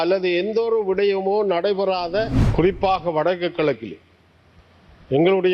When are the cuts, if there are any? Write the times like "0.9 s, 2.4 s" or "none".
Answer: 2.4 s

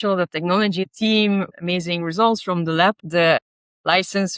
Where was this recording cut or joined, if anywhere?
0.8 s, 1.5 s, 3.0 s

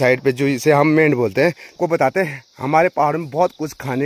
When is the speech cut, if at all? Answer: 1.8 s

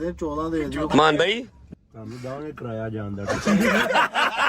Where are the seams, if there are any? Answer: 1.6 s, 3.4 s

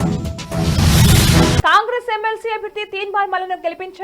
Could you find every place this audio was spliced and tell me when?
1.2 s

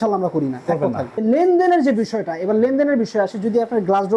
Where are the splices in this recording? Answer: 1.2 s

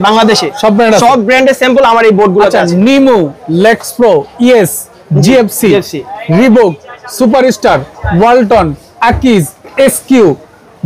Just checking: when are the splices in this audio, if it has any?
none

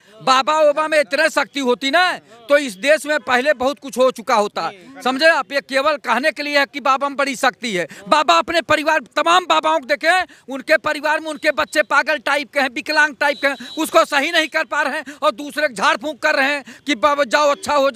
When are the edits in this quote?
none

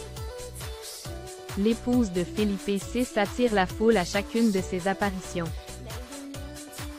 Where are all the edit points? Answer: 1.4 s, 5.5 s

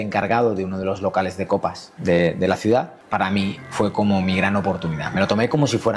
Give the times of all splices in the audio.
1.9 s, 3.3 s

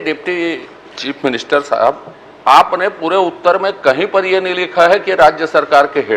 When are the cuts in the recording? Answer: none

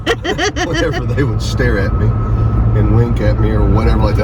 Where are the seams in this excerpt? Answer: none

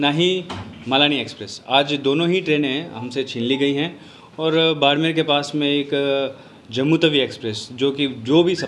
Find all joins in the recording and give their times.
none

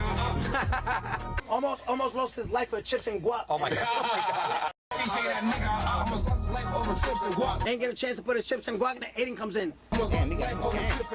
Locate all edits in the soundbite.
none

